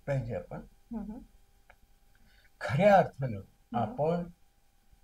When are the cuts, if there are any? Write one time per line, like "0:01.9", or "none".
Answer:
none

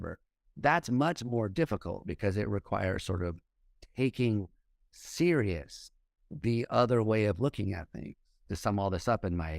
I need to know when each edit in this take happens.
0:08.4

